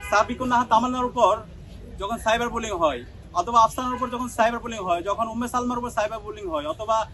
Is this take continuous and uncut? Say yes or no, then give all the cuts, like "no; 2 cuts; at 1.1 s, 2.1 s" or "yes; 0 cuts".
yes; 0 cuts